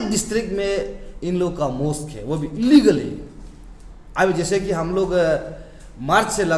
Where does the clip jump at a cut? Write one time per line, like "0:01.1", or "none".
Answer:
none

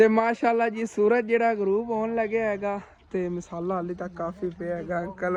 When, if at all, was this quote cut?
none

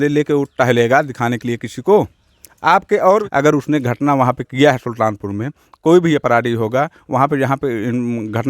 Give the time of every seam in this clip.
0:03.2

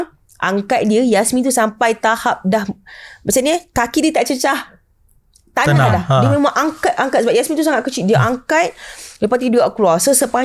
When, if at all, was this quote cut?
none

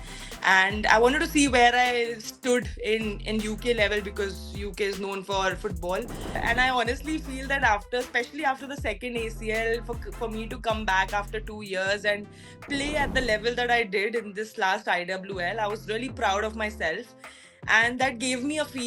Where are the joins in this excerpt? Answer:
0:06.4

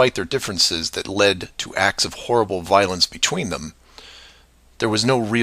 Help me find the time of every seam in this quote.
0:01.6

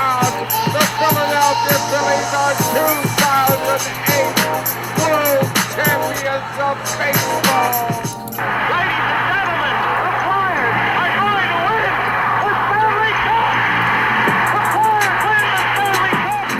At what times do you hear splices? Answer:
none

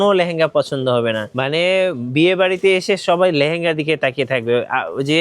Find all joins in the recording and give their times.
0:01.3

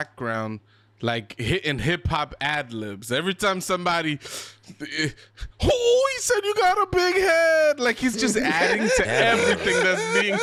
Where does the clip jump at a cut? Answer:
none

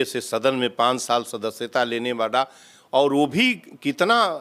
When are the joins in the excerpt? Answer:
none

